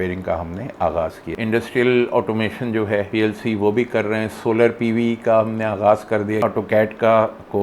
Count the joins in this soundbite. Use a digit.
3